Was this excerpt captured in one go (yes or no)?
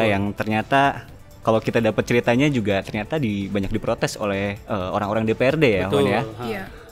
yes